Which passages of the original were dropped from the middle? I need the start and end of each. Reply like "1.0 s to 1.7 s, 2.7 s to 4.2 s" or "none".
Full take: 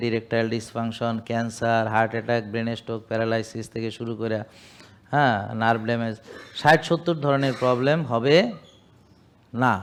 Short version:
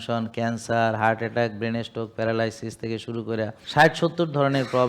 4.5 s to 6.5 s